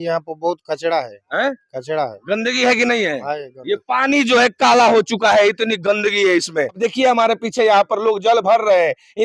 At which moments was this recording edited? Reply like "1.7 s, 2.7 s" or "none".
6.8 s